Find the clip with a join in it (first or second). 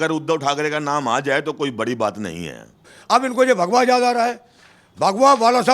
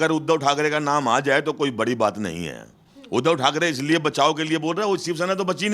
first